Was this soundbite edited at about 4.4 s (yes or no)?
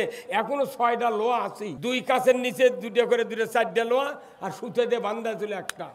no